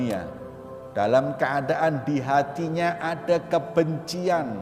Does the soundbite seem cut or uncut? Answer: uncut